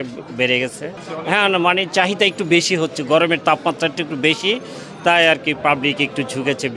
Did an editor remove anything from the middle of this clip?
no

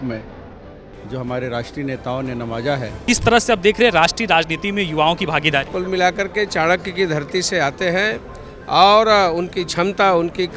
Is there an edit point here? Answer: yes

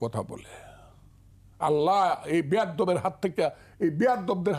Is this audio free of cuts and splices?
yes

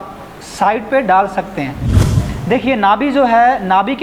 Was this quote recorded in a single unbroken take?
no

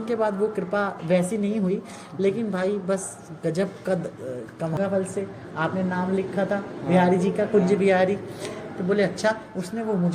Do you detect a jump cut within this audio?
yes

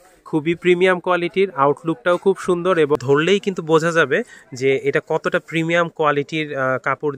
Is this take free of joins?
no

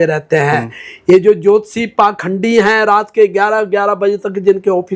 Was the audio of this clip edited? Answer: no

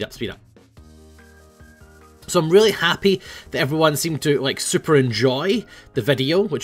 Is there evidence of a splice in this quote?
yes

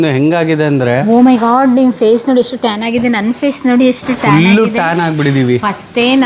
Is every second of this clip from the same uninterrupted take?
yes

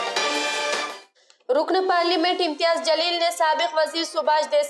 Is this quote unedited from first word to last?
no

